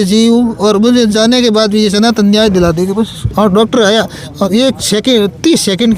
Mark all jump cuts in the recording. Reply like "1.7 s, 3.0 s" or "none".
3.2 s